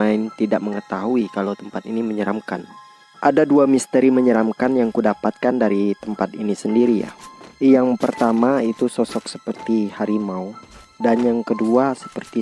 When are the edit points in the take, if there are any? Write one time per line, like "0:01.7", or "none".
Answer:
none